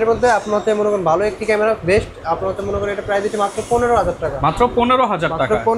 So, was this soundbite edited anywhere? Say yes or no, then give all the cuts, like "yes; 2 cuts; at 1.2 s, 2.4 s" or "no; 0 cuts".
no; 0 cuts